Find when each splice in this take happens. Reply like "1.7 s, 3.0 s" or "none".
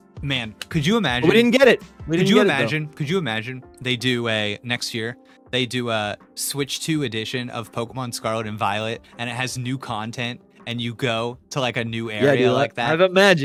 none